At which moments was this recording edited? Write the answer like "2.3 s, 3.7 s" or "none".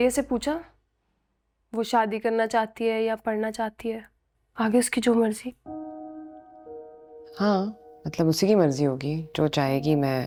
none